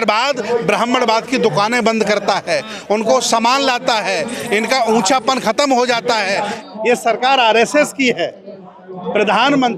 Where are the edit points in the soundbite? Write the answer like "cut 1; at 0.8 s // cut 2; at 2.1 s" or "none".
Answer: cut 1; at 6.5 s